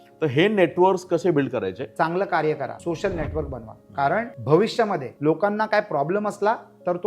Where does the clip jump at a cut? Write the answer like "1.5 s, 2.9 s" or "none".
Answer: 1.8 s, 2.8 s, 4.3 s, 5.1 s